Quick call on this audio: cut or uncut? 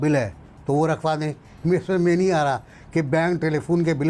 uncut